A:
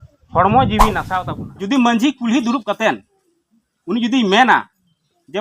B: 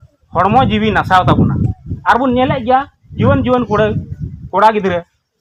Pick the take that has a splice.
A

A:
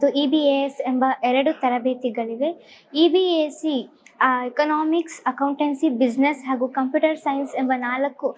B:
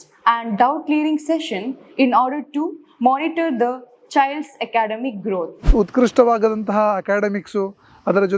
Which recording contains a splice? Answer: B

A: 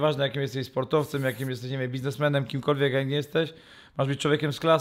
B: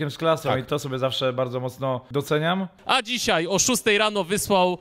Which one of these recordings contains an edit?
B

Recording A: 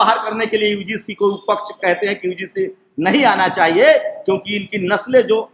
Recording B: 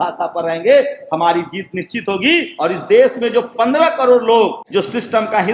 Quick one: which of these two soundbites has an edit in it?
B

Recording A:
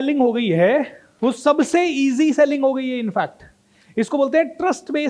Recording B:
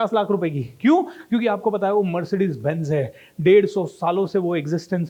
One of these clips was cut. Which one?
A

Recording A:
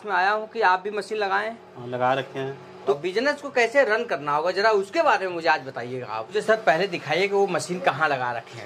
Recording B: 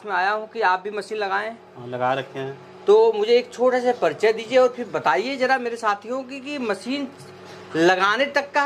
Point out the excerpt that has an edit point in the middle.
A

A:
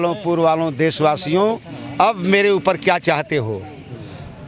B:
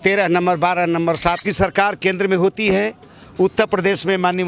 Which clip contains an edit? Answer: B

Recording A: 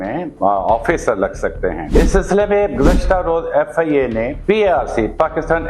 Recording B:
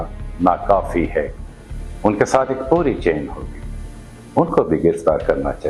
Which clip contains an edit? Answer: A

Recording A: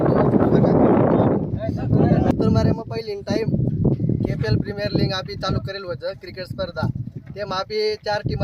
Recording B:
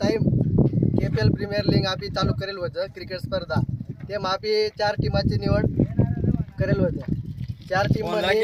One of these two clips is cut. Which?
A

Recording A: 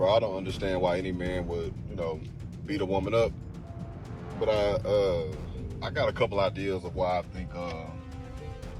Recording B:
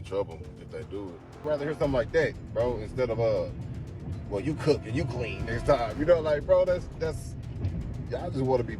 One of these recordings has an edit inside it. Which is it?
B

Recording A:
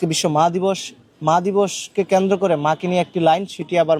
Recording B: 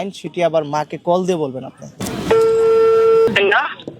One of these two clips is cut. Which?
B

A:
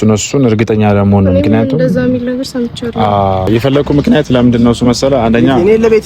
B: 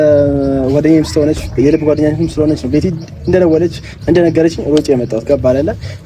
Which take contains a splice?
A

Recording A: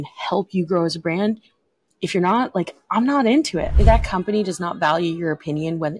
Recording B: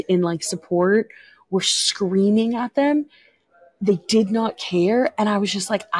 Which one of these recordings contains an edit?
A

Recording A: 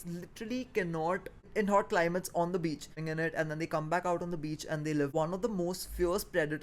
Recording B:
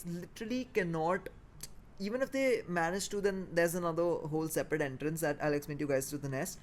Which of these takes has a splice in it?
A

